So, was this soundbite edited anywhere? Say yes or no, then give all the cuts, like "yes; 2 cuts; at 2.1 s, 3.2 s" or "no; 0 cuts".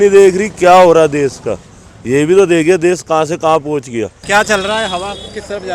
yes; 1 cut; at 4.2 s